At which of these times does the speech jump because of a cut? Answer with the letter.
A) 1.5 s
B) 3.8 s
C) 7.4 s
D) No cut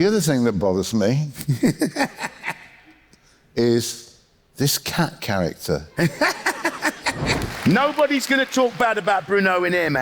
C